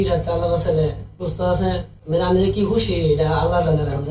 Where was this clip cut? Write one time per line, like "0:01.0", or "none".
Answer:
0:01.1
0:01.9